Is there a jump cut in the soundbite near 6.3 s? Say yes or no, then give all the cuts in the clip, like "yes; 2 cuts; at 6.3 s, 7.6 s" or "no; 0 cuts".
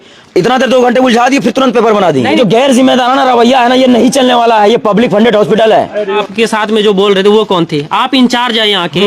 yes; 2 cuts; at 2.4 s, 6.3 s